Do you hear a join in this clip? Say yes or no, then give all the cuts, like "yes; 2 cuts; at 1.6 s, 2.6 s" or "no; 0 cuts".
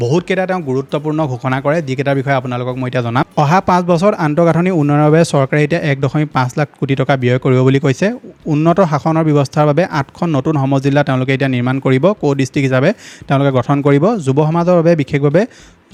no; 0 cuts